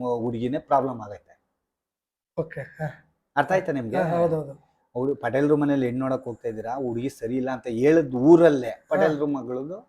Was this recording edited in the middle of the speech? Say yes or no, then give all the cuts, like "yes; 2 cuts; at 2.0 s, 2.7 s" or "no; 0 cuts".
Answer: no; 0 cuts